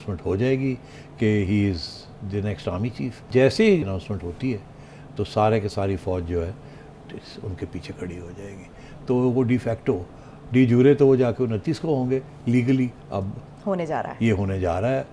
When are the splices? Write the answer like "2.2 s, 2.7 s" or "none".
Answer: 3.2 s, 3.8 s, 13.0 s